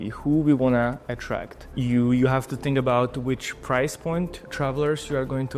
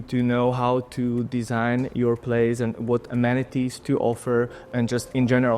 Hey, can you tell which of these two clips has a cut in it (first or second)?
second